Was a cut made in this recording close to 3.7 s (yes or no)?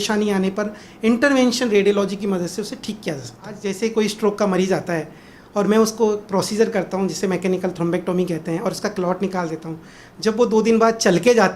yes